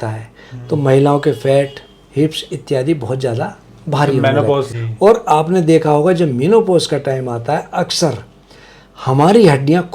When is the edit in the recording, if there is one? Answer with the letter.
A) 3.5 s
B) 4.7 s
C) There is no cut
B